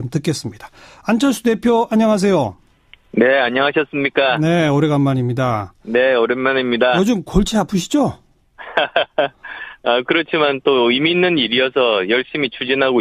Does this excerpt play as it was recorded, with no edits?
yes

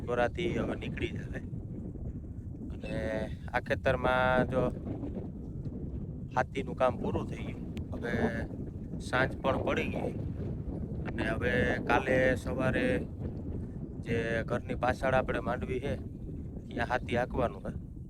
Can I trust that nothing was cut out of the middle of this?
yes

